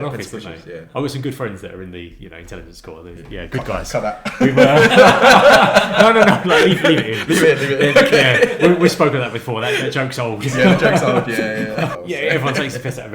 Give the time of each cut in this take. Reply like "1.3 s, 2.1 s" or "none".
11.9 s